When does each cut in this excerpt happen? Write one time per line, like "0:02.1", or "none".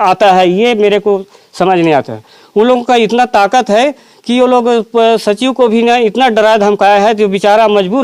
none